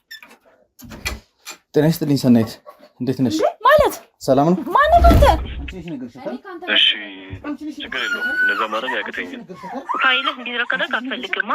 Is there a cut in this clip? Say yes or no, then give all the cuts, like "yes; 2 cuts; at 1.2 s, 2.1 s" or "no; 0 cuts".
yes; 1 cut; at 5.4 s